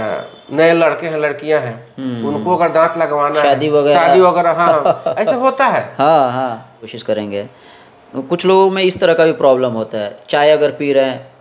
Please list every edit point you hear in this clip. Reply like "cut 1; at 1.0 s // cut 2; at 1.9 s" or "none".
cut 1; at 6.9 s

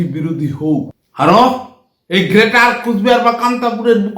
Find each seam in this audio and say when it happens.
cut 1; at 1.0 s

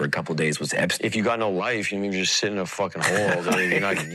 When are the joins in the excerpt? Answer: none

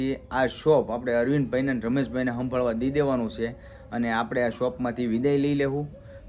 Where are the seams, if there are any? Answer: none

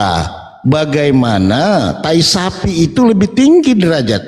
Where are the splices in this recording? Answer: none

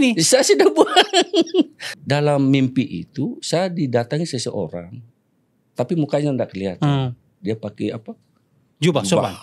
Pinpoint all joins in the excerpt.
cut 1; at 1.9 s

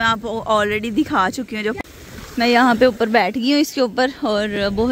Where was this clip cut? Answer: cut 1; at 1.8 s

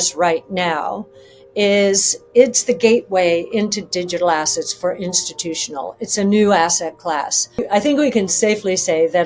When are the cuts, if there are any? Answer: cut 1; at 7.6 s

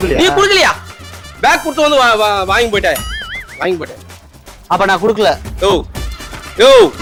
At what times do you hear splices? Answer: none

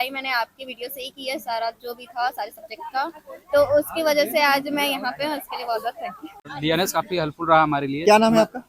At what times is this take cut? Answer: cut 1; at 6.5 s

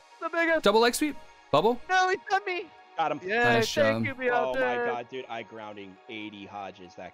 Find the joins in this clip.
none

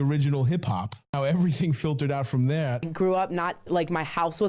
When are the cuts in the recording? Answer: cut 1; at 2.9 s

